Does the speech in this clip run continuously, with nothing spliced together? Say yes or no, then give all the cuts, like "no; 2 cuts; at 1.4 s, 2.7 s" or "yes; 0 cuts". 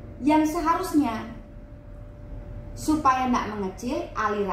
yes; 0 cuts